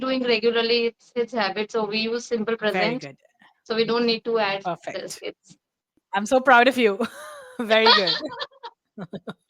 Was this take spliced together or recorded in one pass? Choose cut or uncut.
cut